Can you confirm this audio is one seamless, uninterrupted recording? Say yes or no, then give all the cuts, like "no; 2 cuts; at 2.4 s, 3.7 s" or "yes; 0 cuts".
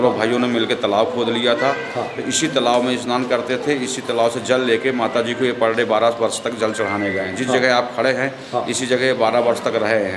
yes; 0 cuts